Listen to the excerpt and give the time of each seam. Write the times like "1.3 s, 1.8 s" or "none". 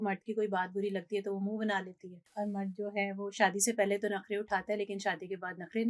2.2 s